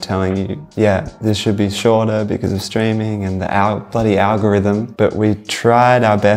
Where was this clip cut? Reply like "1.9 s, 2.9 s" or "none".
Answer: 4.9 s